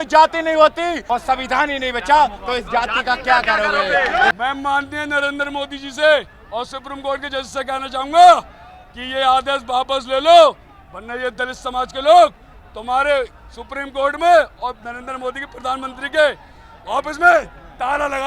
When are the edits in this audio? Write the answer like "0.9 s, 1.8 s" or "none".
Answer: 0.9 s, 4.3 s